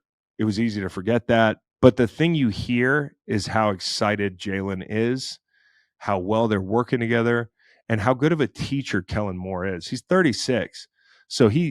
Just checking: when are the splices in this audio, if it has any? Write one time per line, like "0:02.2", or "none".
0:01.7